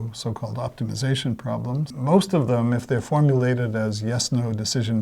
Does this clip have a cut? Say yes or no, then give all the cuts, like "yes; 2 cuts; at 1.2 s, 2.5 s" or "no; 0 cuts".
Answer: yes; 1 cut; at 1.9 s